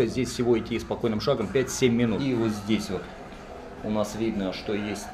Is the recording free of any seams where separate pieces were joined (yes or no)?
yes